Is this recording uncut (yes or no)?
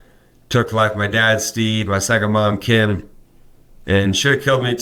yes